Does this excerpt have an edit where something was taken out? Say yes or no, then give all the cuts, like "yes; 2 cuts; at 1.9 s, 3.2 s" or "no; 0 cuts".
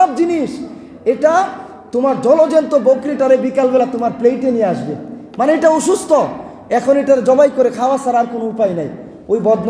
no; 0 cuts